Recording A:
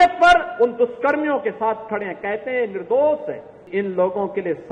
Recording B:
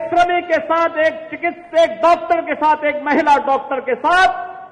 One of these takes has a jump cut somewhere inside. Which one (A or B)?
A